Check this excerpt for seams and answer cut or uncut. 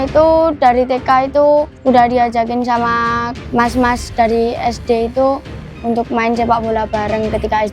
cut